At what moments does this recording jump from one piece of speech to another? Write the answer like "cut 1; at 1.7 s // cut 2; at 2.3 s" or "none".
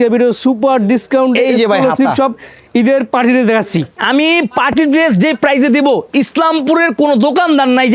cut 1; at 4.0 s